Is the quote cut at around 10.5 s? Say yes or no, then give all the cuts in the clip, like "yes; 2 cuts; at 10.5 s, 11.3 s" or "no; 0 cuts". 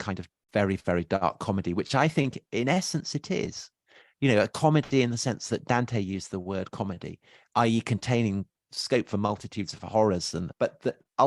yes; 2 cuts; at 8.7 s, 10.5 s